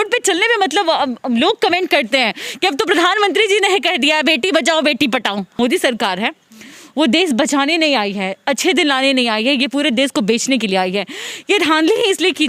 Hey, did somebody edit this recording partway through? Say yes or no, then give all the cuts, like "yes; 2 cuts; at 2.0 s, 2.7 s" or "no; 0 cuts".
yes; 1 cut; at 5.6 s